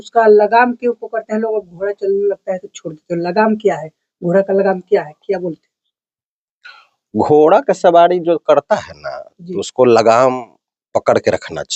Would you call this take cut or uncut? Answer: uncut